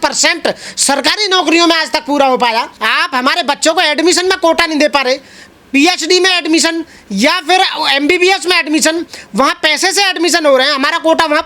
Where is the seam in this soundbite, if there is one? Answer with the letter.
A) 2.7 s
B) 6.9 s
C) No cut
C